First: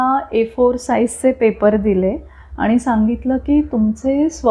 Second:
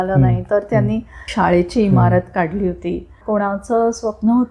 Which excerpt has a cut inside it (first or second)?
second